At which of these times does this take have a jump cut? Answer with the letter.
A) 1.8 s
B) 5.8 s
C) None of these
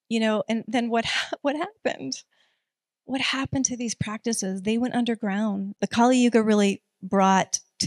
B